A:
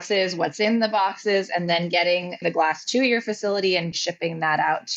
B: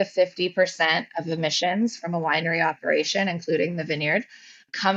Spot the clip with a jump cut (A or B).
A